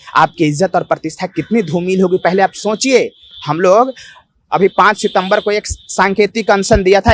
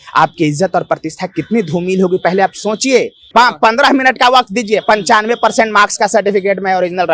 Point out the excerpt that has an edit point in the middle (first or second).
second